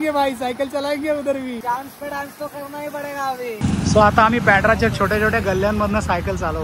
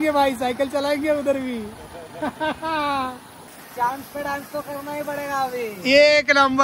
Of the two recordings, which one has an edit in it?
first; 2 cuts; at 1.6 s, 3.5 s

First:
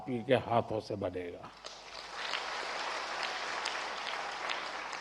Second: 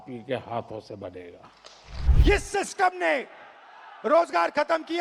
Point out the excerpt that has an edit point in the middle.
second; 1 cut; at 2.0 s

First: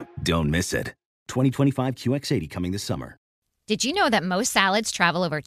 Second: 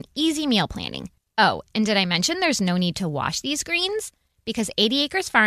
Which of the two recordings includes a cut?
first; 1 cut; at 3.3 s

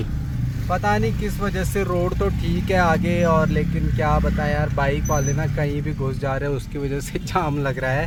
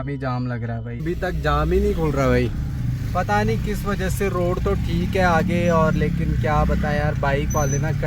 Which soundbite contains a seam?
second; 1 cut; at 1.0 s

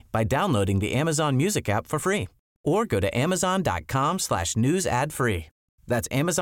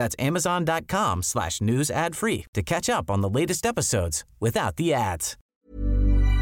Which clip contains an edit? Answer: second; 1 cut; at 5.3 s

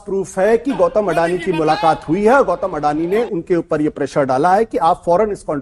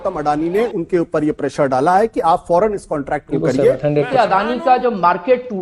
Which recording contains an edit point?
second; 1 cut; at 4.0 s

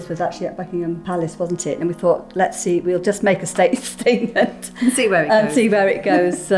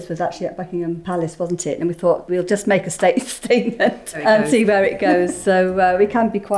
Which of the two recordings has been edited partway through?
second; 2 cuts; at 2.3 s, 4.2 s

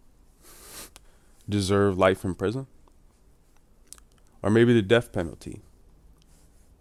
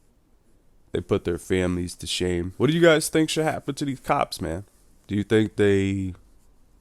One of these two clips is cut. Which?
second; 1 cut; at 2.5 s

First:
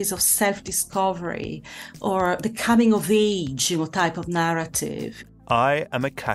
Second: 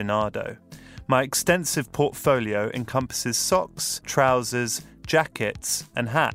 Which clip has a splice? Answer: first; 1 cut; at 5.2 s

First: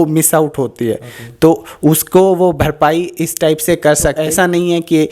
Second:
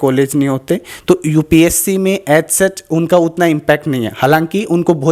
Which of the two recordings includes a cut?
first; 1 cut; at 4.2 s

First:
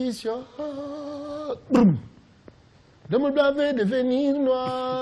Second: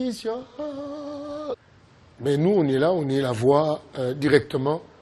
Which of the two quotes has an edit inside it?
second; 1 cut; at 1.6 s

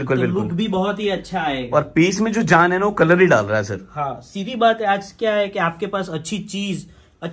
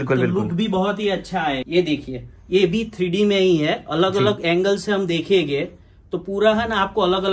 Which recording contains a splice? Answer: second; 1 cut; at 1.6 s

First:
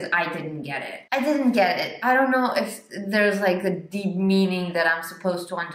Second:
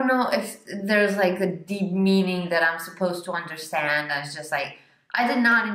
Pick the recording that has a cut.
first; 1 cut; at 0.9 s

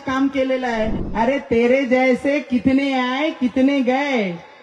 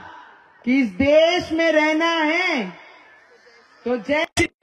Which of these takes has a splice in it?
first; 1 cut; at 1.0 s

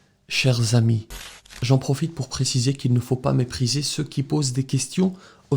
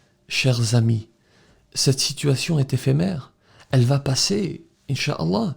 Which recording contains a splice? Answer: first; 1 cut; at 1.6 s

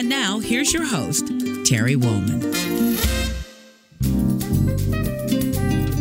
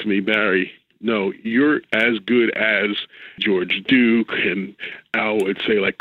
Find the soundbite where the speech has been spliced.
second; 1 cut; at 3.4 s

